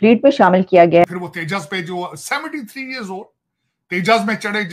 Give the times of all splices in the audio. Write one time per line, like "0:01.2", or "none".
0:01.0